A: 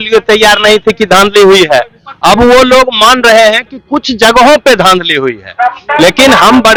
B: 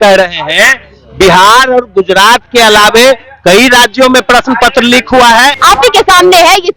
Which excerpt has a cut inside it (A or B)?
B